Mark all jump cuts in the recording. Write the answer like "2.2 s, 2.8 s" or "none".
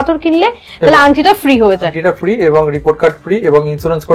none